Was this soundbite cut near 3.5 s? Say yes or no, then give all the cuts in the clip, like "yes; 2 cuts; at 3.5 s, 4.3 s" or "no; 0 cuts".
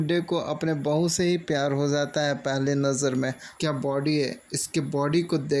yes; 1 cut; at 3.5 s